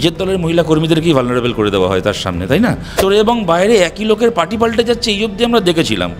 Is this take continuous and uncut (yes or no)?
no